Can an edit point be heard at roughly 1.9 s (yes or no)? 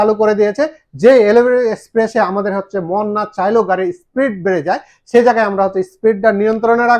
no